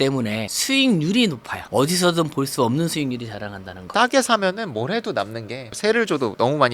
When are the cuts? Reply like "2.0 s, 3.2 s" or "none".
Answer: none